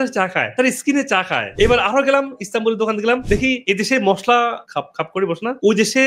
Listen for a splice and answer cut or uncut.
uncut